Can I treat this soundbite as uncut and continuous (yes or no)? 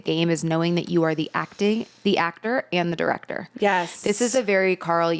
yes